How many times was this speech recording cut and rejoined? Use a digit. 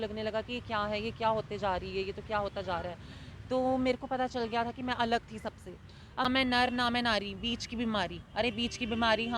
1